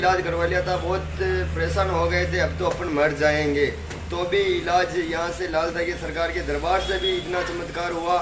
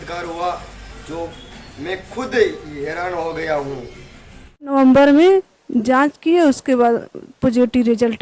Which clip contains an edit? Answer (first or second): second